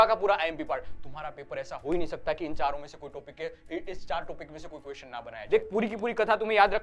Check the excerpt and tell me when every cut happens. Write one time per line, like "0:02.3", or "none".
0:05.4